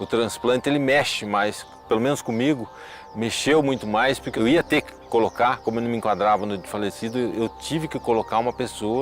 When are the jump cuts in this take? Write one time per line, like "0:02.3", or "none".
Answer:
0:01.7
0:04.3